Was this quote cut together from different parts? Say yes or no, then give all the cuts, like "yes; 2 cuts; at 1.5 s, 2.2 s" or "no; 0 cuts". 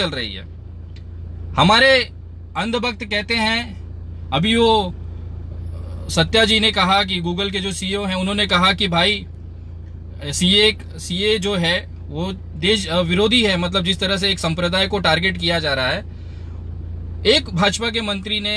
no; 0 cuts